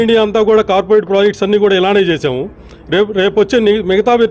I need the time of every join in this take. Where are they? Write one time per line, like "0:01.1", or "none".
none